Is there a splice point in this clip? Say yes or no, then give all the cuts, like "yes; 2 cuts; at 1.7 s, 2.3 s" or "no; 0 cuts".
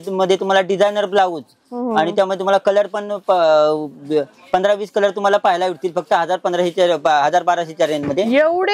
no; 0 cuts